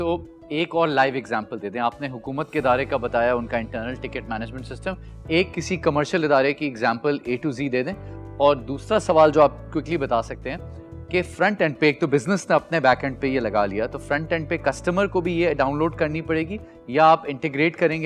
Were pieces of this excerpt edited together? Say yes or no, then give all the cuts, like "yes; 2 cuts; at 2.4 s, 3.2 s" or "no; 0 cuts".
no; 0 cuts